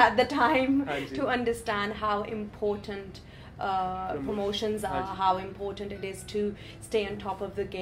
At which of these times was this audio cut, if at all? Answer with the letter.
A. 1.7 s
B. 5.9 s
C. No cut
C